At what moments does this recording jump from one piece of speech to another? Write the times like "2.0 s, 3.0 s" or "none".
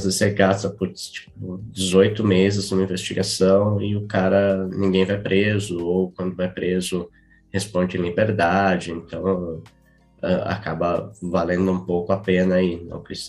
none